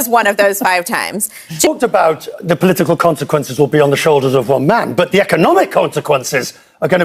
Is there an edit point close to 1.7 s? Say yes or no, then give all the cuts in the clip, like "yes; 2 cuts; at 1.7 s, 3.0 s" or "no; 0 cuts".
yes; 1 cut; at 1.7 s